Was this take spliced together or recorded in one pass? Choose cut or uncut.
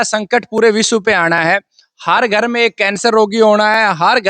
uncut